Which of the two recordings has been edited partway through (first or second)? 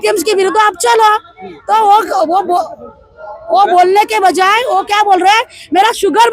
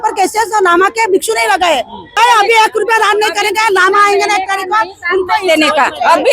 second